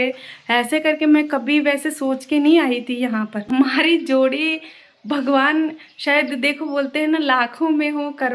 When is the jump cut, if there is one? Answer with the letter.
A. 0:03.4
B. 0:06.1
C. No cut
A